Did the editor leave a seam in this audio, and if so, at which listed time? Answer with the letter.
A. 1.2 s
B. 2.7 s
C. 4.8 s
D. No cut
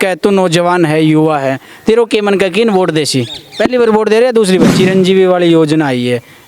C